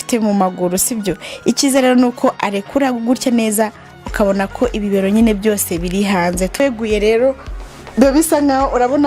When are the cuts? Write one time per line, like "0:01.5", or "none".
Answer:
0:06.6

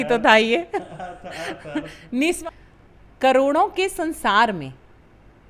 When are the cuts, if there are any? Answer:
0:02.4

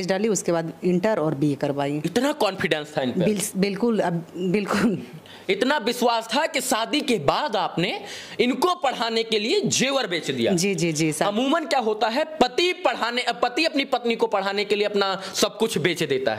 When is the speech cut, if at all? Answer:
none

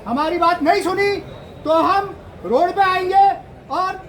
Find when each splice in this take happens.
none

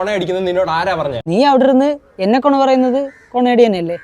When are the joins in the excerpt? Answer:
0:01.2

